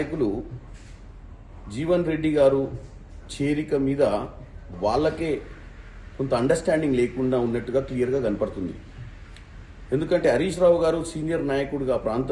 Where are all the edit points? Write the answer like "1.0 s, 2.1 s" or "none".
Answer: none